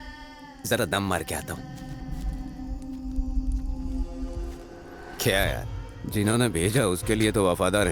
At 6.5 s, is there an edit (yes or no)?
no